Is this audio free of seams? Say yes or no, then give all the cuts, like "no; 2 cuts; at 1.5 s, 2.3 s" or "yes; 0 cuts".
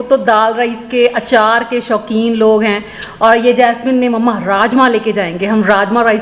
yes; 0 cuts